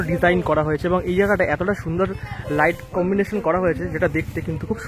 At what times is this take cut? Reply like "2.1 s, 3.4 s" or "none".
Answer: none